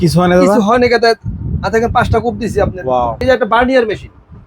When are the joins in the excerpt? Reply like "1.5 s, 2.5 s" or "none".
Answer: 3.2 s

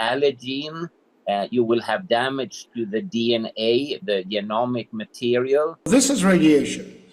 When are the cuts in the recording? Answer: 5.9 s

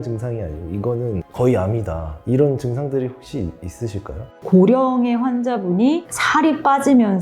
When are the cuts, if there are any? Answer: 4.4 s

